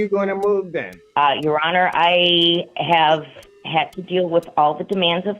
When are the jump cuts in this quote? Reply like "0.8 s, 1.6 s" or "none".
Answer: 1.0 s